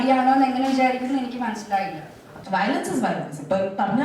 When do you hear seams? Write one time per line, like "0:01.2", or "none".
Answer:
0:02.3